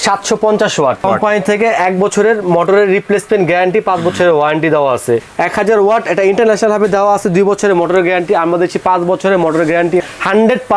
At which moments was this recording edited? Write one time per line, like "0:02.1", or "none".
0:01.0
0:05.3
0:10.0